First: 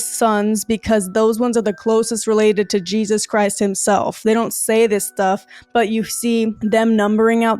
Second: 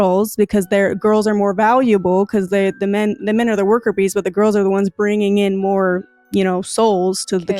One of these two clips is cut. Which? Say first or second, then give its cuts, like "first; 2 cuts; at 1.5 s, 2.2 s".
first; 1 cut; at 6.6 s